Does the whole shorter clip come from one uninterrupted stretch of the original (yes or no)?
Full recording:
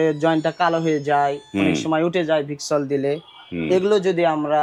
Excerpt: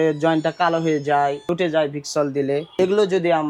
no